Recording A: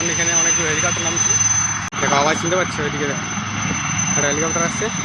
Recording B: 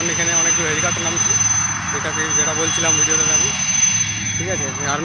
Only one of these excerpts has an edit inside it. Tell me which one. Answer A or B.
A